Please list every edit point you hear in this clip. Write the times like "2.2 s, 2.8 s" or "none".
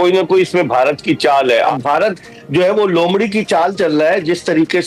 1.7 s